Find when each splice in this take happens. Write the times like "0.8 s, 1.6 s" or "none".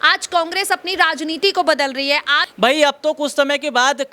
2.4 s